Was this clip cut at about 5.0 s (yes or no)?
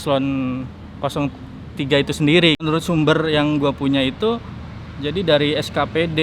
no